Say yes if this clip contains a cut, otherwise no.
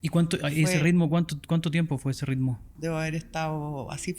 yes